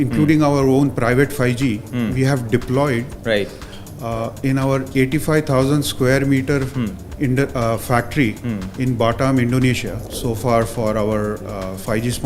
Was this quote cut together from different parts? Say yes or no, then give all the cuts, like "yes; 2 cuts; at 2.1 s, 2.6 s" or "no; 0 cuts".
yes; 1 cut; at 10.0 s